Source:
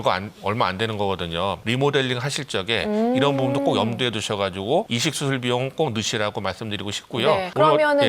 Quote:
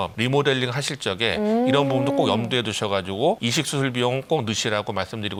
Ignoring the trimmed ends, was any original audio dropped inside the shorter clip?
no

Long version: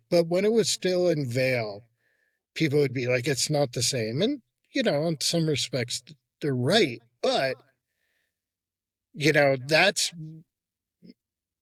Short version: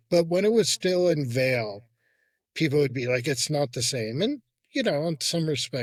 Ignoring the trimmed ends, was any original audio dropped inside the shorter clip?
no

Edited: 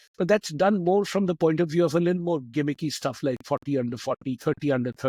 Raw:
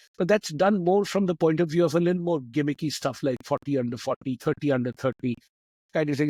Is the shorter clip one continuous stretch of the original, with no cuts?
yes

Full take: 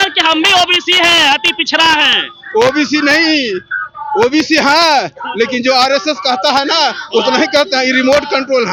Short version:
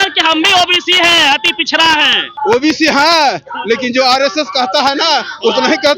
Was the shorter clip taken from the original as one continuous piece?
no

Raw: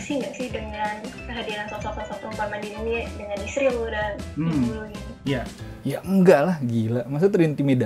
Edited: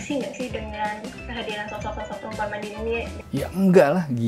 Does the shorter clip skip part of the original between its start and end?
yes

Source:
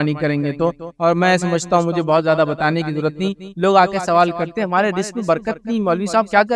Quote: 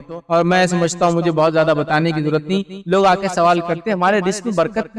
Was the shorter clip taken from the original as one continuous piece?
yes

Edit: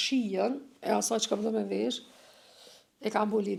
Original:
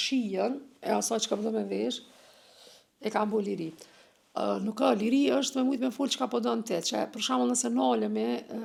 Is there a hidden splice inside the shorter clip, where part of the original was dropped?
no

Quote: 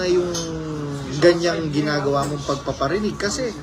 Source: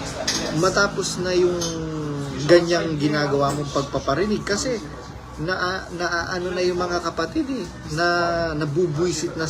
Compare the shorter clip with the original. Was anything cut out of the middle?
no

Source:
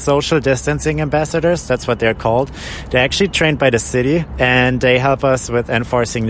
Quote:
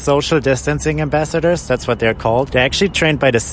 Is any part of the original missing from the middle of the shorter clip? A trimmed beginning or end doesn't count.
yes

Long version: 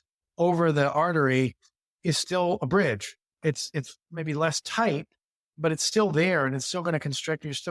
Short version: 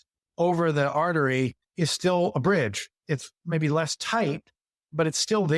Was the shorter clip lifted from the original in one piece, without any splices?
no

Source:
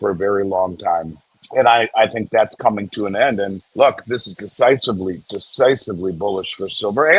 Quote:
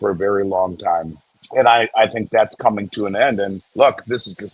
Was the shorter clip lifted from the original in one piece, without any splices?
yes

